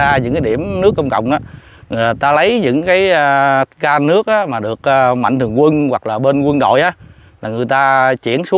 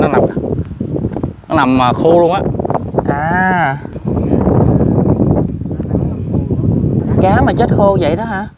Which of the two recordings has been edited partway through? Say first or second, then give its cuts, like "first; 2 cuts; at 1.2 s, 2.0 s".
second; 2 cuts; at 3.9 s, 7.0 s